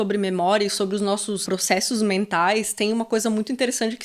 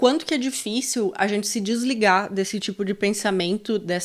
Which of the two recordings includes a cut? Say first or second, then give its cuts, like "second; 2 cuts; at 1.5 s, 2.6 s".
first; 1 cut; at 1.4 s